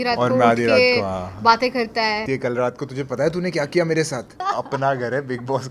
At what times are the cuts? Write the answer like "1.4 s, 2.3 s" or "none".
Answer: 2.2 s, 4.4 s